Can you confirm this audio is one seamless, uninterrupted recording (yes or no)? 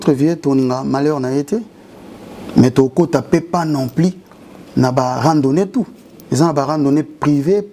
yes